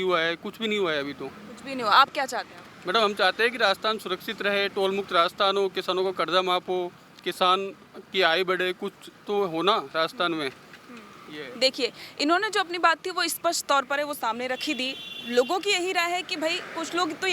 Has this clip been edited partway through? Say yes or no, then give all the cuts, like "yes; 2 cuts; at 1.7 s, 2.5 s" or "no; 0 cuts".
no; 0 cuts